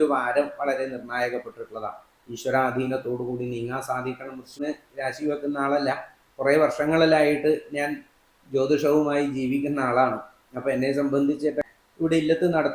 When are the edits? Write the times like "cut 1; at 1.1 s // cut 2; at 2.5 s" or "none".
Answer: cut 1; at 4.6 s // cut 2; at 11.7 s